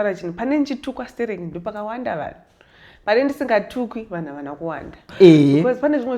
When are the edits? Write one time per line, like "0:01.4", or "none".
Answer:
0:05.1